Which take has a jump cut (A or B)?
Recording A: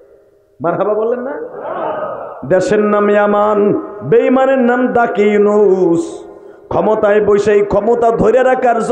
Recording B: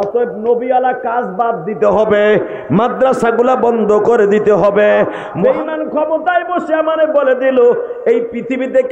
B